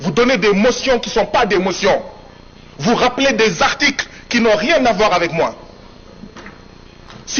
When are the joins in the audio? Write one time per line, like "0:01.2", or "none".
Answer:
none